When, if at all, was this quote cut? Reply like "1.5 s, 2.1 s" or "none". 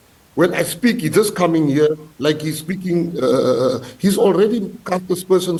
none